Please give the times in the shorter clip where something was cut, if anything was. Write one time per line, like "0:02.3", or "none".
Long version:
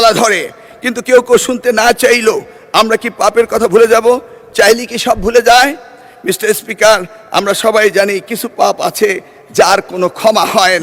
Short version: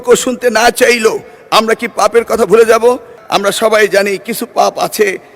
0:03.1